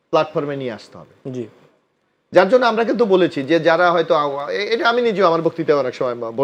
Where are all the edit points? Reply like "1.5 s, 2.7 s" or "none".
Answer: none